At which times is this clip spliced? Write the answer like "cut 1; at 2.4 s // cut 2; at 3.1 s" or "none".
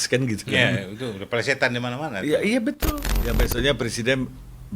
cut 1; at 3.1 s